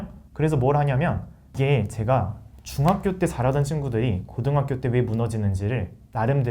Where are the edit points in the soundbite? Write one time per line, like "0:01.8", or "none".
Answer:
0:01.4

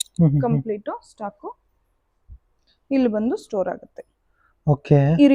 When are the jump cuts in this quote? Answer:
none

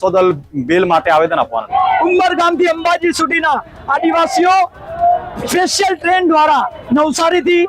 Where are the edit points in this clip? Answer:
0:01.7

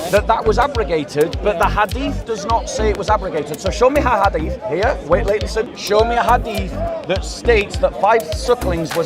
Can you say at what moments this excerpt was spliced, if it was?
0:05.8

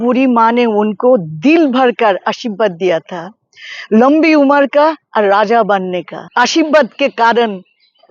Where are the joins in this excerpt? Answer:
0:06.2

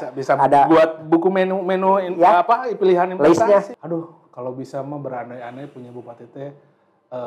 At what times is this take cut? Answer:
0:03.7

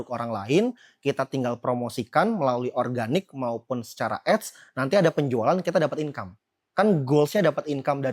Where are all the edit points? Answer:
none

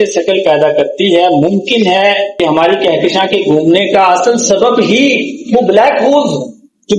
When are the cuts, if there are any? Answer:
0:02.3

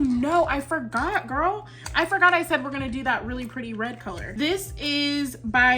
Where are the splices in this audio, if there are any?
0:04.2

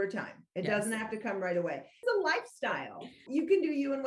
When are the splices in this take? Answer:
0:02.0
0:03.2

